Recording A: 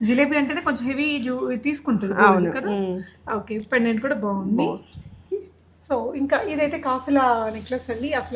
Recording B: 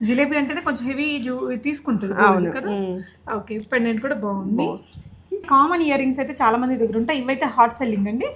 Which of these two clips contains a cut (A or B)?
B